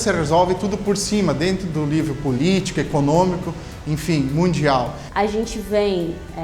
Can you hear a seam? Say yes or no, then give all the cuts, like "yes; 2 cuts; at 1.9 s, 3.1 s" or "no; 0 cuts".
yes; 1 cut; at 5.0 s